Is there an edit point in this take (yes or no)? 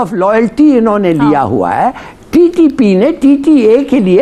no